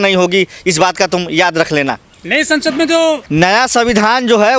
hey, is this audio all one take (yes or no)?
yes